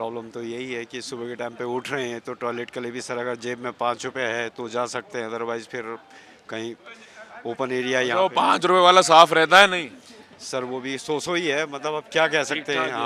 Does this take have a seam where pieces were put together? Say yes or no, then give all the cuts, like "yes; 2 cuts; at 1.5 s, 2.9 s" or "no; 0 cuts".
no; 0 cuts